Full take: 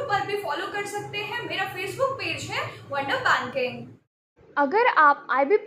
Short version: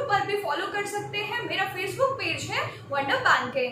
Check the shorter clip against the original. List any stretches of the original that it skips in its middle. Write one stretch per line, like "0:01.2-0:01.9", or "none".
none